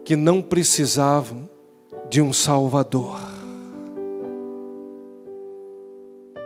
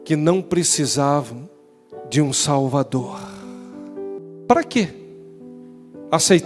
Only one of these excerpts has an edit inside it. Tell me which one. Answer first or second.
second